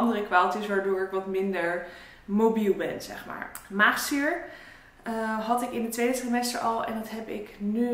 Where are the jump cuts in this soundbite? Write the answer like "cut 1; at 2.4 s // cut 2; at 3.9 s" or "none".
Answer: none